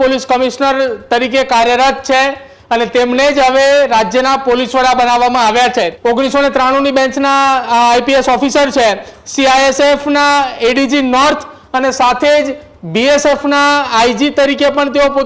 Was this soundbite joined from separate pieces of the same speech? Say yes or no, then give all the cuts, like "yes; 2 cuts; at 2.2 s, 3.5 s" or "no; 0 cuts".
yes; 1 cut; at 5.9 s